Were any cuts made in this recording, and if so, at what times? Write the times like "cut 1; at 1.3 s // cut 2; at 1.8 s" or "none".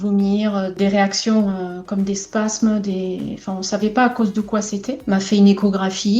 cut 1; at 4.9 s